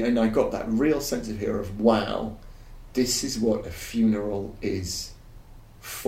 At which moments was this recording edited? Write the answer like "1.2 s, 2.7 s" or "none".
none